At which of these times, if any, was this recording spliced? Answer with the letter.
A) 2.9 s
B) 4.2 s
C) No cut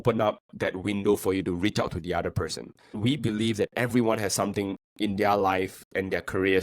A